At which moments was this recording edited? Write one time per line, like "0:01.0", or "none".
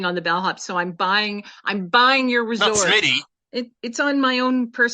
0:03.4